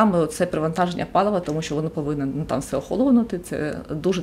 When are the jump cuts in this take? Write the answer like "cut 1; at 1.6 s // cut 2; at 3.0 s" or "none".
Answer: none